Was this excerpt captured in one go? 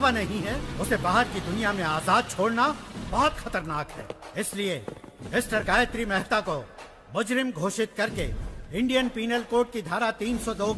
yes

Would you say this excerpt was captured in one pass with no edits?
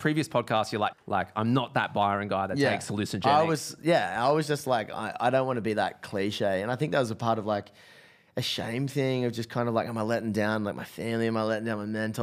no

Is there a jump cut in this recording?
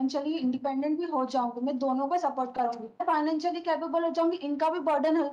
yes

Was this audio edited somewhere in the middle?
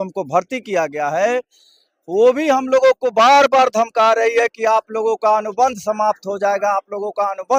no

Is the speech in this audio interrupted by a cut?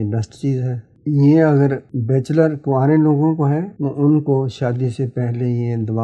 yes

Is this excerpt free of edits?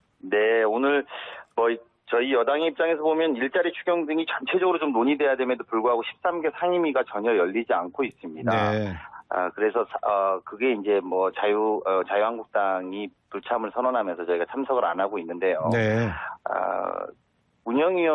yes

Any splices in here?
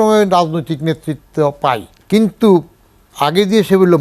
yes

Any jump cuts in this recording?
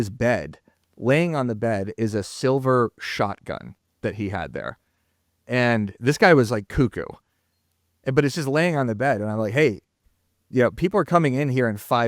no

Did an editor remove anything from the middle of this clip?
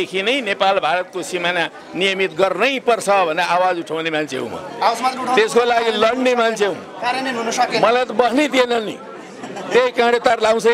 no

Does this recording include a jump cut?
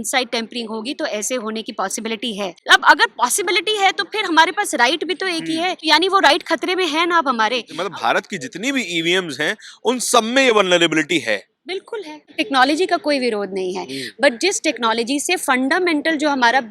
yes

